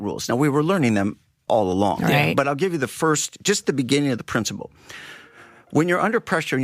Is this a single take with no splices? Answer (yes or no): yes